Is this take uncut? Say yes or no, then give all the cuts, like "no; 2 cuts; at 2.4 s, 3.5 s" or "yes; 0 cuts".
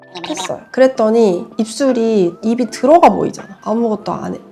yes; 0 cuts